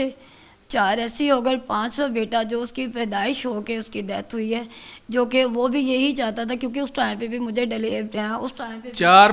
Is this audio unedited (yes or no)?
yes